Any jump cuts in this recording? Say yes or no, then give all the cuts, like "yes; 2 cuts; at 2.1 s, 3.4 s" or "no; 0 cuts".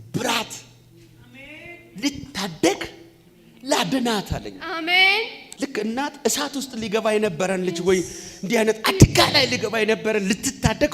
yes; 1 cut; at 5.4 s